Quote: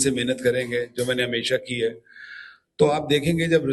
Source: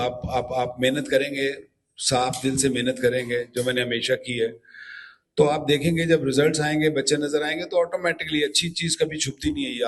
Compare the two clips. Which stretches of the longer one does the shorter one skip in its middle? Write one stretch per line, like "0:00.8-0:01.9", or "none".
none